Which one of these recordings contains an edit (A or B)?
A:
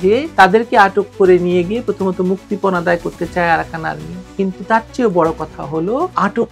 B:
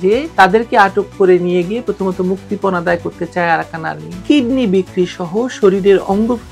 B